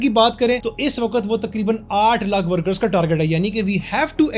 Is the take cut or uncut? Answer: uncut